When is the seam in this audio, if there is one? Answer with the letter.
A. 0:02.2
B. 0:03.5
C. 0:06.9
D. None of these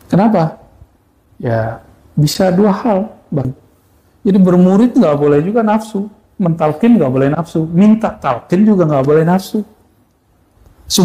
B